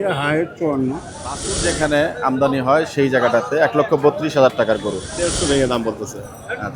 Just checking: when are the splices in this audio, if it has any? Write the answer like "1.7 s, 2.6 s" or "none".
1.5 s, 5.2 s